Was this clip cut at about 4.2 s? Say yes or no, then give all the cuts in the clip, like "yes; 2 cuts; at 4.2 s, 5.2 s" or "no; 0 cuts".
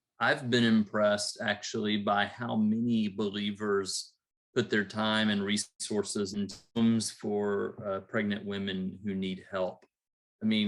no; 2 cuts; at 5.7 s, 6.6 s